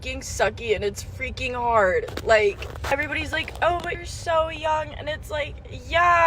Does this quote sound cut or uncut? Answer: cut